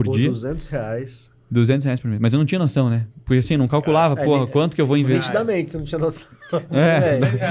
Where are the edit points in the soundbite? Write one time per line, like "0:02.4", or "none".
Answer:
none